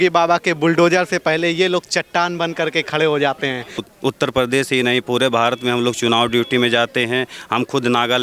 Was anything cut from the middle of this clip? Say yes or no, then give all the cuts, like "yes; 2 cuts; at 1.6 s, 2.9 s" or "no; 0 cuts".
yes; 1 cut; at 3.9 s